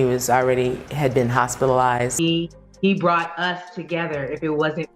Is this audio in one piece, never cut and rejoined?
no; 1 cut; at 2.1 s

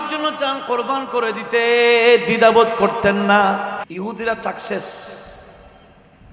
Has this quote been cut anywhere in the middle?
yes; 1 cut; at 3.9 s

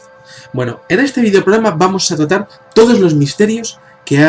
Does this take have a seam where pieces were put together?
yes; 1 cut; at 1.7 s

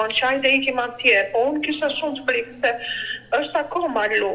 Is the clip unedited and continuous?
yes; 0 cuts

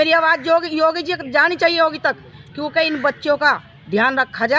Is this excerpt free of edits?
yes; 0 cuts

